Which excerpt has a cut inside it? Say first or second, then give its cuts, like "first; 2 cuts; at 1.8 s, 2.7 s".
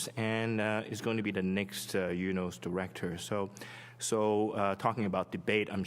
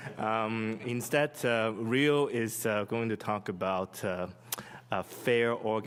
first; 1 cut; at 1.4 s